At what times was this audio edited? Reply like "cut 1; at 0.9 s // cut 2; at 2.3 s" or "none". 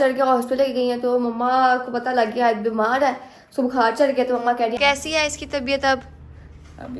cut 1; at 4.7 s